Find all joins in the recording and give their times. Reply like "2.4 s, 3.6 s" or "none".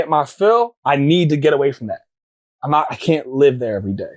none